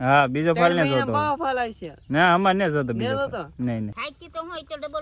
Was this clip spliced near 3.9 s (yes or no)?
yes